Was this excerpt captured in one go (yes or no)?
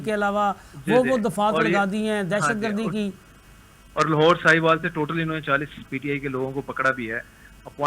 yes